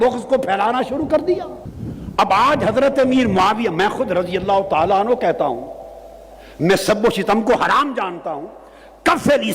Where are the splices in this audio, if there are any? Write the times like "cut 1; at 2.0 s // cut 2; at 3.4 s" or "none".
none